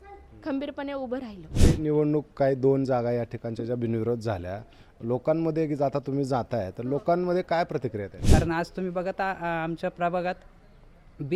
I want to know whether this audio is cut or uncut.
cut